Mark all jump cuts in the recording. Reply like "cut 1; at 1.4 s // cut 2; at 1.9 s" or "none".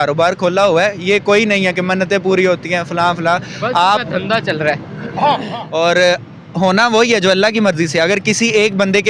cut 1; at 5.6 s

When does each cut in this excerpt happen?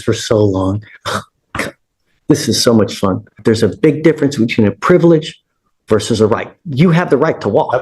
cut 1; at 3.4 s

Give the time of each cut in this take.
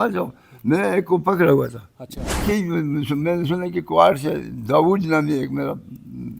cut 1; at 2.4 s

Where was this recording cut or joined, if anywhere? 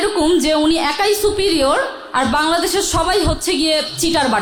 none

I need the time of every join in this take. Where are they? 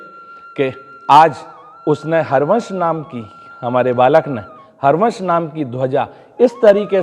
none

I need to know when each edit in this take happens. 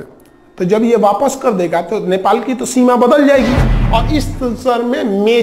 cut 1; at 3.7 s

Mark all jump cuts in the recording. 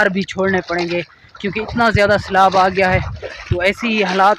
none

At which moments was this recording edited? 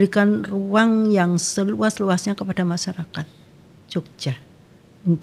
none

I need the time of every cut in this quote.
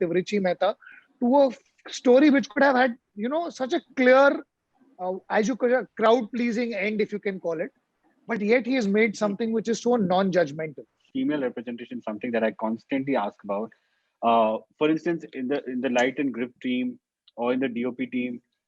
cut 1; at 11.0 s

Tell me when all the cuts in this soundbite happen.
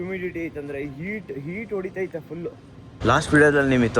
cut 1; at 2.8 s

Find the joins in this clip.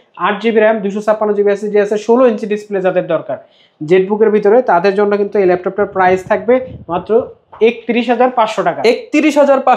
none

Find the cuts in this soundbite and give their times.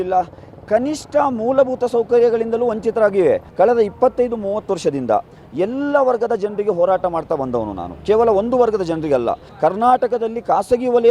cut 1; at 3.5 s // cut 2; at 9.4 s

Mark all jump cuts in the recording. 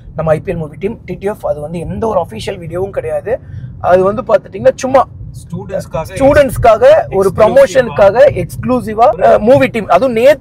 none

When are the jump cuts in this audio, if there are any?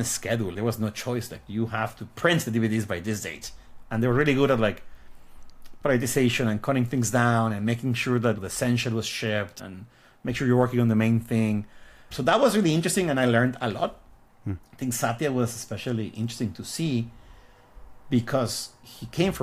none

